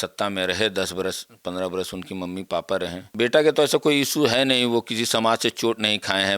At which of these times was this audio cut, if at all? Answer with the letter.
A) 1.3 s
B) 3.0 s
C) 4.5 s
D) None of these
B